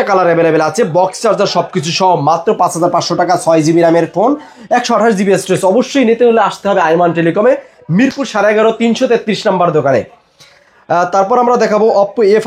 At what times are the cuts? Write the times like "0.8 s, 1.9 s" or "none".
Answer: none